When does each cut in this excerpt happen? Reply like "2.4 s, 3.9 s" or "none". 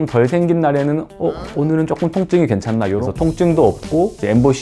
1.1 s, 3.0 s